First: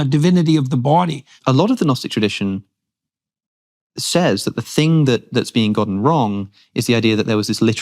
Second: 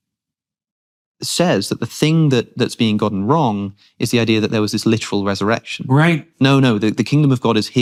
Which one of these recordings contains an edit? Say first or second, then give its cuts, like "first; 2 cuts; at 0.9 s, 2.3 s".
first; 1 cut; at 1.3 s